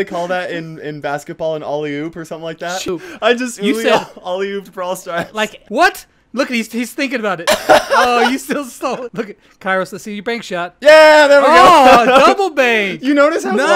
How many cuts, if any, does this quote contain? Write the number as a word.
three